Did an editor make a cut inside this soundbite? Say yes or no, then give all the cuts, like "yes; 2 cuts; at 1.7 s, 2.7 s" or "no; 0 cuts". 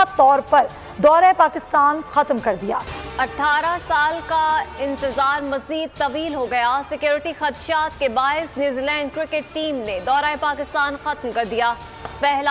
yes; 1 cut; at 3.0 s